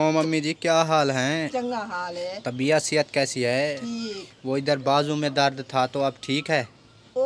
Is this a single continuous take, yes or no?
yes